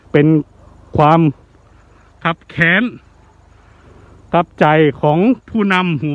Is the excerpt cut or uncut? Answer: uncut